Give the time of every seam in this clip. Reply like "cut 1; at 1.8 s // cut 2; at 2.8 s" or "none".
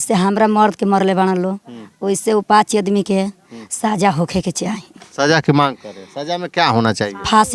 none